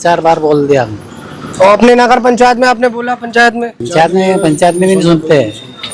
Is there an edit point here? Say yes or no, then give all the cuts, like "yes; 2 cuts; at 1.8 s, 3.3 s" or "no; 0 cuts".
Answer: yes; 1 cut; at 3.8 s